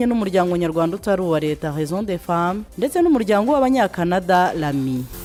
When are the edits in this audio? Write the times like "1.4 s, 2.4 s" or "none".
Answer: none

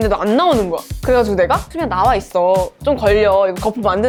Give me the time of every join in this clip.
none

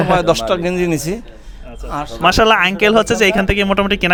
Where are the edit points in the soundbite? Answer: none

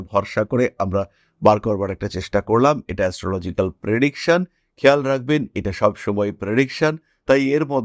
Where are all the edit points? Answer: none

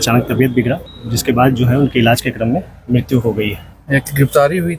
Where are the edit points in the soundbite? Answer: 0.9 s, 3.7 s

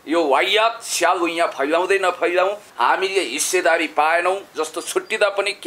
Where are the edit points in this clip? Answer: 2.7 s

